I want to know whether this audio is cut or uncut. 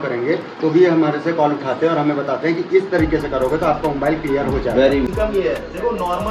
cut